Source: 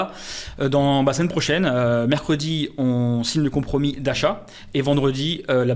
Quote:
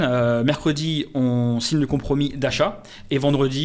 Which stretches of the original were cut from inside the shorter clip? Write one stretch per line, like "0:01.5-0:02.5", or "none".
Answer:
none